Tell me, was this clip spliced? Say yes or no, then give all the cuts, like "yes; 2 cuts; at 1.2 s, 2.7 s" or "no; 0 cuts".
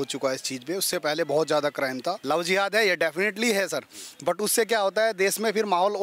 yes; 1 cut; at 2.2 s